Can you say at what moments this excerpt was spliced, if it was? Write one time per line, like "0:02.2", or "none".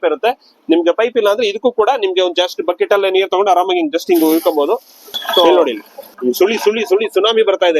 0:05.5